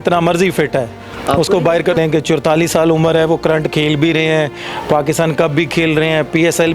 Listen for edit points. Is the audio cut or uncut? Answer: cut